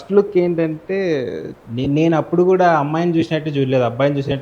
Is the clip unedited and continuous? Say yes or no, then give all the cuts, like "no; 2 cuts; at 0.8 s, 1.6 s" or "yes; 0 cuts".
no; 1 cut; at 1.5 s